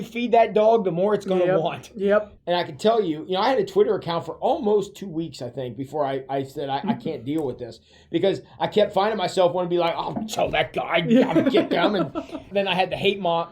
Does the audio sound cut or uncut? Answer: cut